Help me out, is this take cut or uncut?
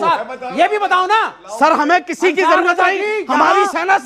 uncut